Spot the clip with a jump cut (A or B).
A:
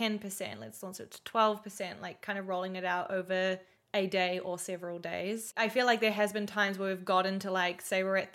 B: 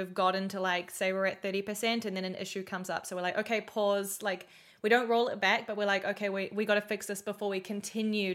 A